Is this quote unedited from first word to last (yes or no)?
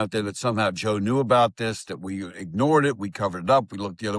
yes